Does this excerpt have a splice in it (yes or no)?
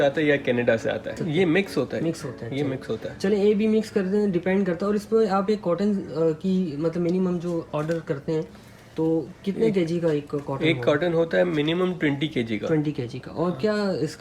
no